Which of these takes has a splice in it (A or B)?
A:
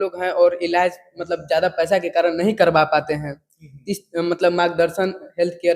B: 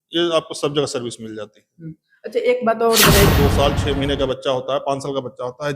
B